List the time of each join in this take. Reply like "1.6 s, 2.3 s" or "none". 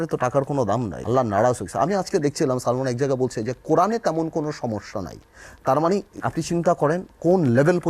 0.9 s, 6.1 s